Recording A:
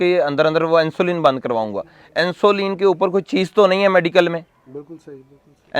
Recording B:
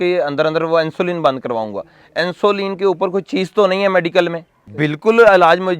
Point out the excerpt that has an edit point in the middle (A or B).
B